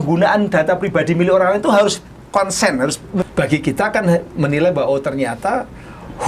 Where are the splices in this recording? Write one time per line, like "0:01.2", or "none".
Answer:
0:03.2